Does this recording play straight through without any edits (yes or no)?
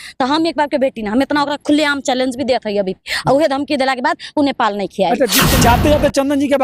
no